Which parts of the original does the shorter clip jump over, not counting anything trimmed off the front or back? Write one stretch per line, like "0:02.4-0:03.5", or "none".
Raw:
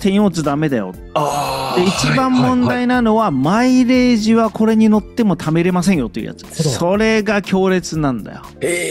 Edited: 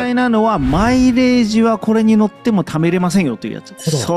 none